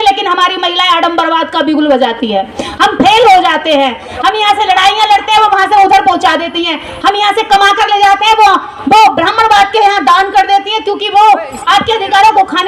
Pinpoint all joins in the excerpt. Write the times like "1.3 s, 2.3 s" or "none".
none